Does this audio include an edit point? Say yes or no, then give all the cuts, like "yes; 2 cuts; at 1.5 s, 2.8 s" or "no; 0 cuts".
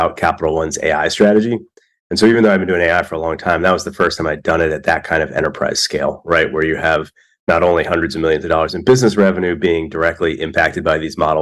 no; 0 cuts